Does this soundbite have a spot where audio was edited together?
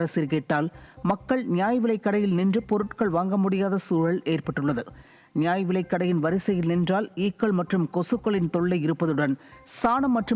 no; 0 cuts

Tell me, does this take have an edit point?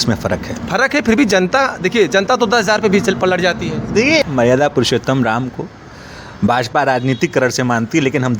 yes; 1 cut; at 4.2 s

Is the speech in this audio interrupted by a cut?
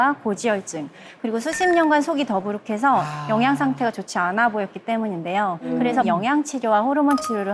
no; 0 cuts

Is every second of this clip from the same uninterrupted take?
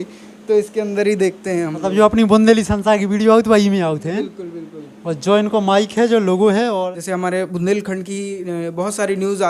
no; 1 cut; at 6.9 s

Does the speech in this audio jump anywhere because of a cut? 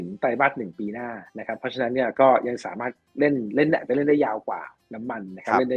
no; 0 cuts

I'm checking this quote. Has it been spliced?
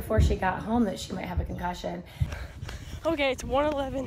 yes; 1 cut; at 2.3 s

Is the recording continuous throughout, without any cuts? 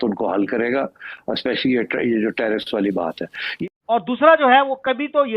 no; 1 cut; at 3.6 s

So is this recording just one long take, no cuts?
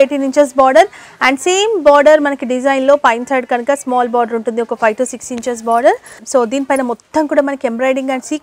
no; 1 cut; at 6.2 s

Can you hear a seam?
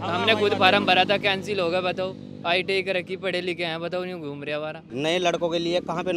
yes; 1 cut; at 4.8 s

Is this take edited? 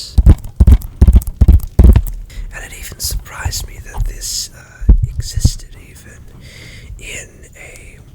yes; 1 cut; at 2.4 s

